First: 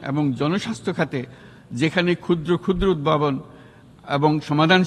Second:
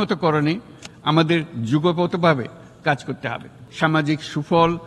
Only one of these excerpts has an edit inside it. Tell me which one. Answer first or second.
second